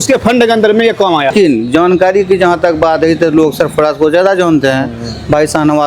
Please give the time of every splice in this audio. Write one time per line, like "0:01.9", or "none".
0:01.3